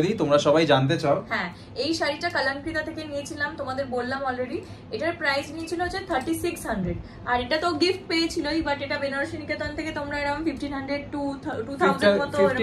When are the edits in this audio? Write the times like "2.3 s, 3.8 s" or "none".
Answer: none